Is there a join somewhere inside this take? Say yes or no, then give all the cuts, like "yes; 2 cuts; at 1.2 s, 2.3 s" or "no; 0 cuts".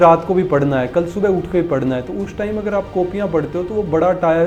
no; 0 cuts